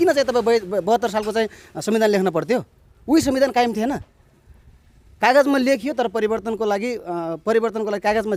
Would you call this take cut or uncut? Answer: uncut